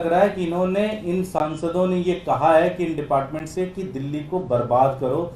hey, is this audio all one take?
yes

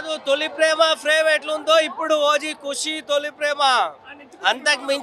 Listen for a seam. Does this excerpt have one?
no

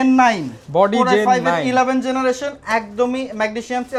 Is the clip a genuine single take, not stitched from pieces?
yes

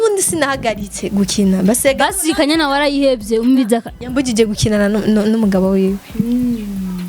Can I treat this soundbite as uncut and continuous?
yes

